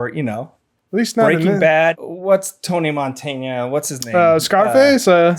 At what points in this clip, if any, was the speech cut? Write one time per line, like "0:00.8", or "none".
0:02.0